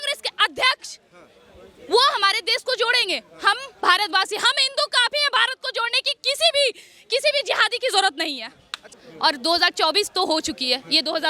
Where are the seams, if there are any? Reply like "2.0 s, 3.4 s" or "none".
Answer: 8.9 s